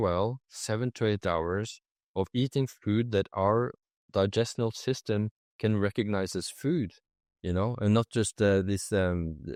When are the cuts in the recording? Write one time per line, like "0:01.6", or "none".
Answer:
none